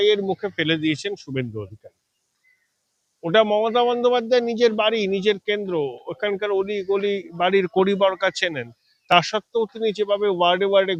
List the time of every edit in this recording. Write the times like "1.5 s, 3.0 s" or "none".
none